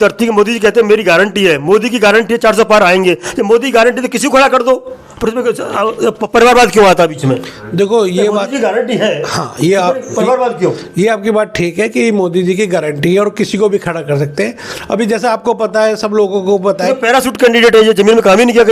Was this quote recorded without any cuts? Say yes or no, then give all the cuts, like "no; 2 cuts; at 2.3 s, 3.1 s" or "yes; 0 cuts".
yes; 0 cuts